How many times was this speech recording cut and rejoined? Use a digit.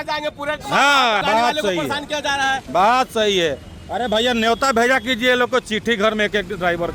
1